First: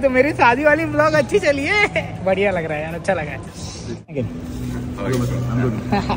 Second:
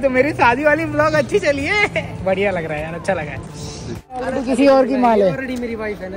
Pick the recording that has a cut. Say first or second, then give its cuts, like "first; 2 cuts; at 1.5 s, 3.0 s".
second; 1 cut; at 4.1 s